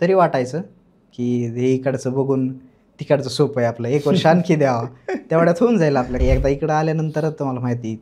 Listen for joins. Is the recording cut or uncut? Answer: cut